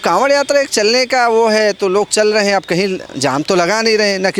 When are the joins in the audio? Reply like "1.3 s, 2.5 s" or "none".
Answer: none